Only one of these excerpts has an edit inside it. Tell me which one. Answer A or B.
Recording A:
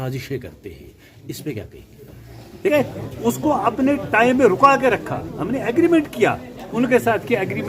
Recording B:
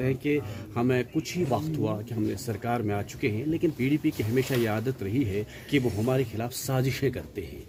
A